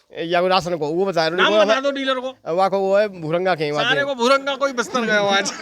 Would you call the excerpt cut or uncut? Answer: uncut